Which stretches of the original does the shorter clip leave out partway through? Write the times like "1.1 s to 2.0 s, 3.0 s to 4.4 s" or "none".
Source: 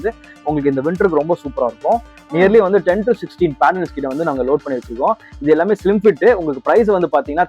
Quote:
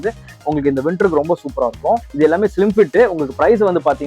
2.1 s to 5.4 s

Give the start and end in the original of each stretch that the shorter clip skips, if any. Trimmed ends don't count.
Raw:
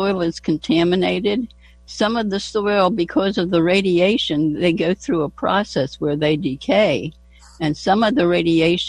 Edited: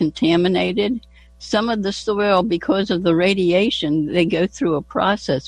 none

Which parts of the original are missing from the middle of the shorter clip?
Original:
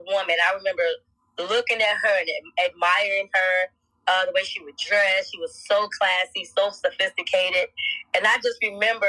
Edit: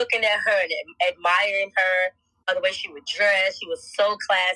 4.0 s to 4.2 s

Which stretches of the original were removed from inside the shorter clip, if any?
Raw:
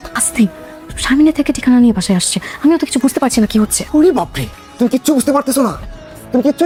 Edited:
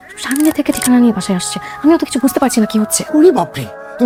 none

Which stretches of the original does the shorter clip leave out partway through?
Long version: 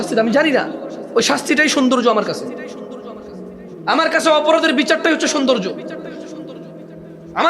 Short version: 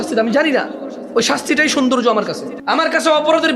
2.5 s to 3.7 s

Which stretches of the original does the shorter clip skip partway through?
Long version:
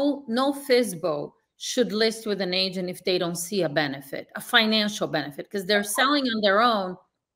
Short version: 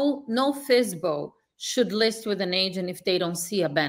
none

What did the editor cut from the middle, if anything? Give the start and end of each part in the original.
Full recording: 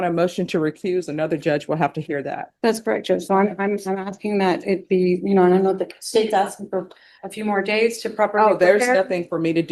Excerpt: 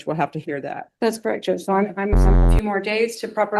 4.1 s to 7.3 s

